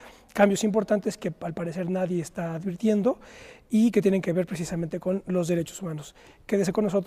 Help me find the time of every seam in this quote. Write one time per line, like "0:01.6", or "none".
0:02.4